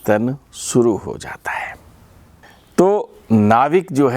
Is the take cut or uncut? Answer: cut